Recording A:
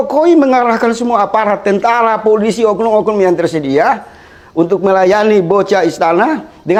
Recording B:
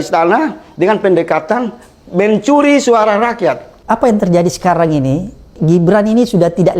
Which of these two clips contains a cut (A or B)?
B